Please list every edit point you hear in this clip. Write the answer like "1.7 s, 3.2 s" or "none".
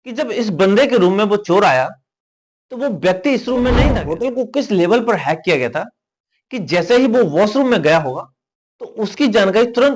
4.1 s